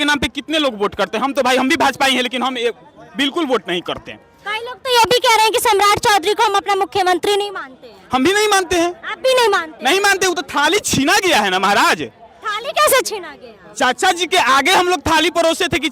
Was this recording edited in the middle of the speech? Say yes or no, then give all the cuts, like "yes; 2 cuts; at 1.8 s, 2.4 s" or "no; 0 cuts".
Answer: no; 0 cuts